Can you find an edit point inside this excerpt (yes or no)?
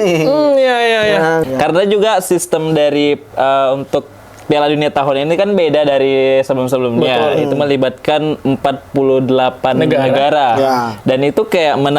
yes